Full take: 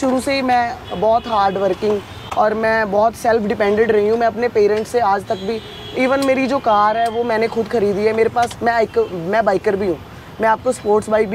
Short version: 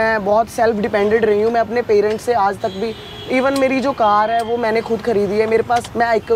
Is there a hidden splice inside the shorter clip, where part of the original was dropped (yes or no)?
no